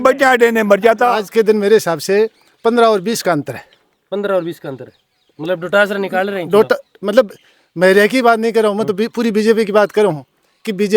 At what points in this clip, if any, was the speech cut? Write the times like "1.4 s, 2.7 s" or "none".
1.2 s

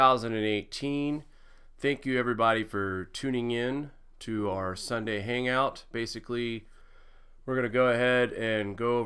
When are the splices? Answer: 4.2 s

